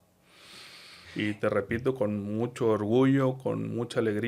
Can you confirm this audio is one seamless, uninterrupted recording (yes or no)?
no